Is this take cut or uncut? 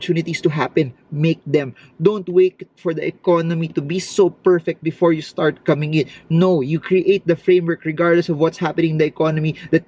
uncut